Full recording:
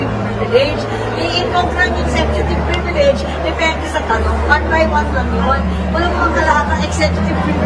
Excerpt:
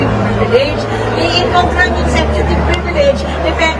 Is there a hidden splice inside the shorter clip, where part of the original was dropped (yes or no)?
no